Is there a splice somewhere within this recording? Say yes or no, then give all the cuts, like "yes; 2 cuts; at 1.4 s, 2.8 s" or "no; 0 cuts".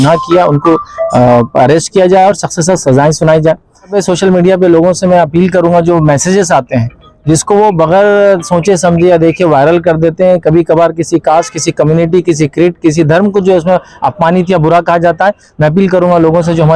yes; 1 cut; at 4.0 s